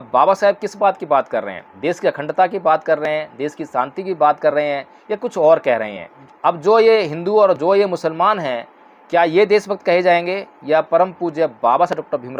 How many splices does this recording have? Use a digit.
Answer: 0